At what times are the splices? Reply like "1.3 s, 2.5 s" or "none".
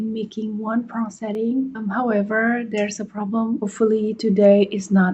1.8 s, 3.6 s

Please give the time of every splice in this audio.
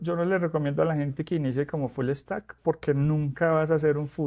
none

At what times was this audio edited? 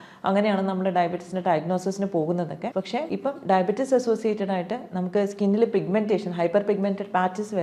2.9 s

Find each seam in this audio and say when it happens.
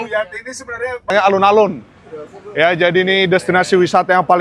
1.1 s

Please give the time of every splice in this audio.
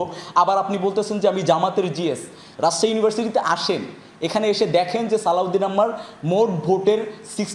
none

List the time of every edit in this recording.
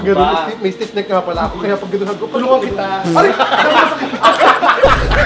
none

